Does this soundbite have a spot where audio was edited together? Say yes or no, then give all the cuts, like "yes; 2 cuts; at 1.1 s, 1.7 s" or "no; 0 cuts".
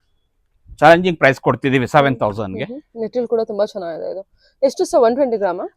no; 0 cuts